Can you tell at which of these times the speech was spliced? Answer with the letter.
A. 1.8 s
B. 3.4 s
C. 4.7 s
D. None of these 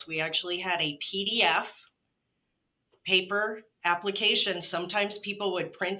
D